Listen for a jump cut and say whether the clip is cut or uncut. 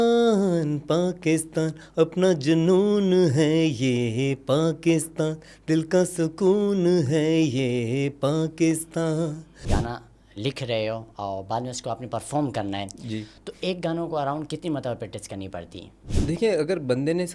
cut